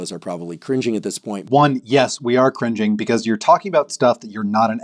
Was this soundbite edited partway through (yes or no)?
yes